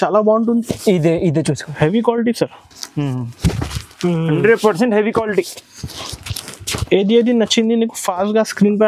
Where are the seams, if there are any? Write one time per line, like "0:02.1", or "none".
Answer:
none